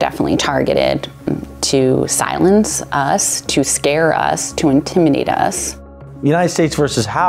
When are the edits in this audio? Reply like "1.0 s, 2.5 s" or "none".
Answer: 1.2 s, 6.1 s